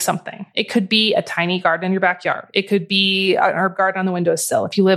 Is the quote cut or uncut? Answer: uncut